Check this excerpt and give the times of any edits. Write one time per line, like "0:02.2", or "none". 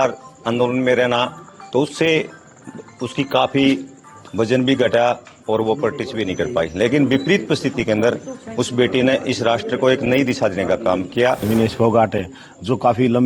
0:11.4